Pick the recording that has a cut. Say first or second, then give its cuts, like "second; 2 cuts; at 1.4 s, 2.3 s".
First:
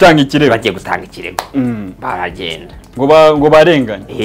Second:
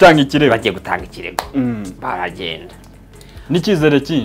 first; 1 cut; at 2.8 s